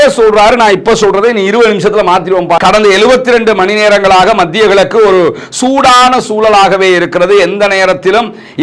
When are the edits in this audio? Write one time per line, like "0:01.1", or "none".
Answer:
0:02.6